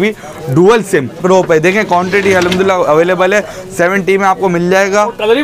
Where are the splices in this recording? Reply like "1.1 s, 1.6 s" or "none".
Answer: 1.2 s